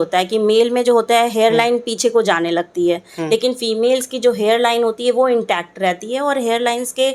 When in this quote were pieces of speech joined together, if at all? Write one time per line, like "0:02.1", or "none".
none